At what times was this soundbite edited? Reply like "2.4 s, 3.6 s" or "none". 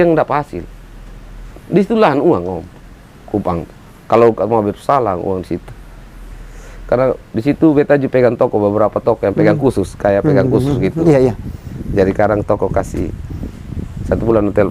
none